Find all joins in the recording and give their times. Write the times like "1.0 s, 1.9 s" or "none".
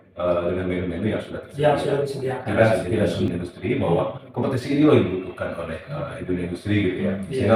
3.2 s